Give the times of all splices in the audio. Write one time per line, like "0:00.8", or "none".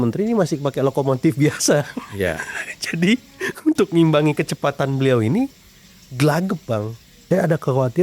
0:07.1

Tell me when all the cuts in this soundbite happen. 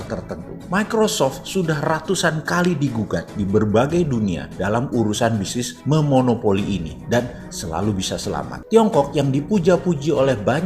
0:08.6

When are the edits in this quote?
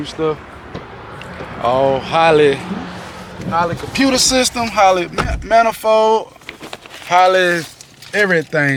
none

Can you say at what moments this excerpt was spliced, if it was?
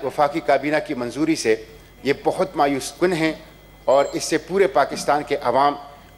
none

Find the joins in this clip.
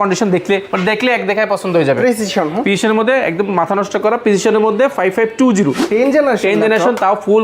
0:05.8

